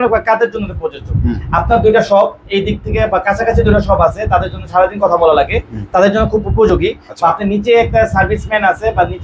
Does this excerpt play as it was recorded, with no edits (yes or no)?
yes